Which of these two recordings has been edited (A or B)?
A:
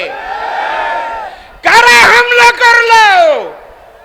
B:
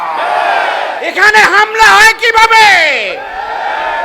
B